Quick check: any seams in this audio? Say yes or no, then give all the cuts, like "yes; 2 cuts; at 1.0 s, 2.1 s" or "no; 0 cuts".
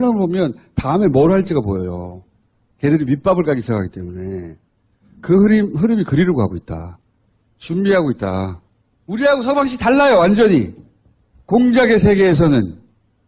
yes; 1 cut; at 2.6 s